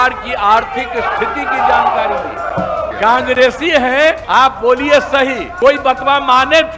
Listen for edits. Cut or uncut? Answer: cut